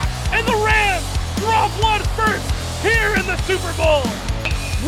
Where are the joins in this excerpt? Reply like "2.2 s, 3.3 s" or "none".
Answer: none